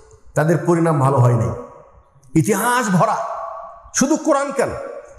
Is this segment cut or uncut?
uncut